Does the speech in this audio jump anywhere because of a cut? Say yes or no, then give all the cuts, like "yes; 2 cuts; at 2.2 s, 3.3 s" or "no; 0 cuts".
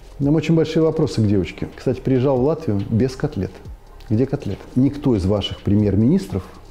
yes; 2 cuts; at 1.6 s, 4.6 s